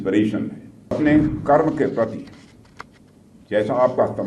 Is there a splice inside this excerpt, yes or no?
yes